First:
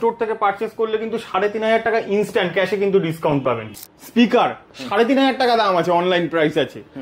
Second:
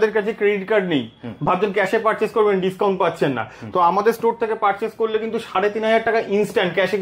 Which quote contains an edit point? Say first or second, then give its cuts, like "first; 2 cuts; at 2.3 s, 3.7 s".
first; 1 cut; at 3.7 s